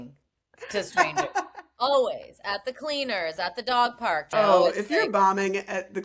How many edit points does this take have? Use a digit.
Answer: 1